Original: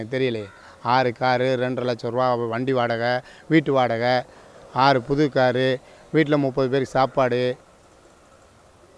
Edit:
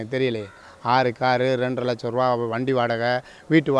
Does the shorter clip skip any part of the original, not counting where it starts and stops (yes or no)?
no